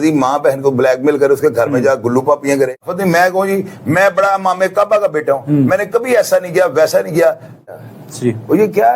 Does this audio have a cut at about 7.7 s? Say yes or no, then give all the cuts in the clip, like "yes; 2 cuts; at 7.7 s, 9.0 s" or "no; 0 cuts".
yes; 2 cuts; at 2.8 s, 7.7 s